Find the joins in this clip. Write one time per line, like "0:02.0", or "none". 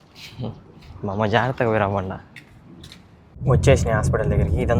0:03.3